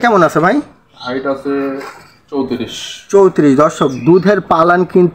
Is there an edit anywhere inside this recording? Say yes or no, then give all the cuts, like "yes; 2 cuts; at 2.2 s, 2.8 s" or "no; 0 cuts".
no; 0 cuts